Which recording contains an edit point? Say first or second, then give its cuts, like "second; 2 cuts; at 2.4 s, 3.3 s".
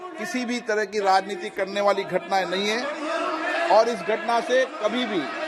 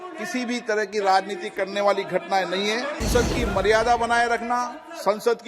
second; 1 cut; at 3.1 s